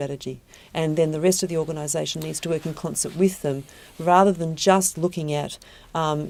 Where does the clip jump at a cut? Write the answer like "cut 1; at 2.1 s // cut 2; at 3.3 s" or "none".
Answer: none